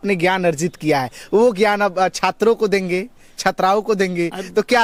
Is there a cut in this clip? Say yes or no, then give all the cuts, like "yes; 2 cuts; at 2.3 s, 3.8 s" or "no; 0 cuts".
no; 0 cuts